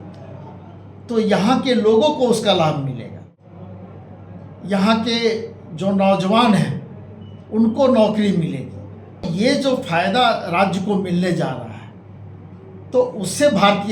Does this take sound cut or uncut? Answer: cut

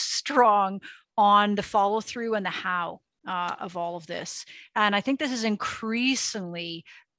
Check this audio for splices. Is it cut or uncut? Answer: uncut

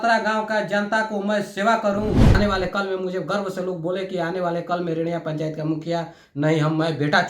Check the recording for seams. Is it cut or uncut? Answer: cut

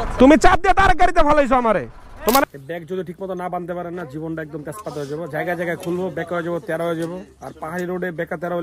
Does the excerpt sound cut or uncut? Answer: cut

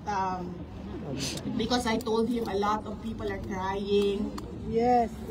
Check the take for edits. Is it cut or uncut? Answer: uncut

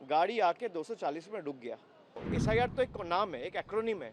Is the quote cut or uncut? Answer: cut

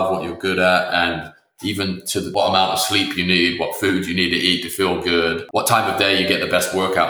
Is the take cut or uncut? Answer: cut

